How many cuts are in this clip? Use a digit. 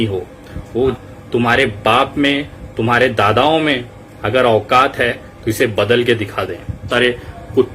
2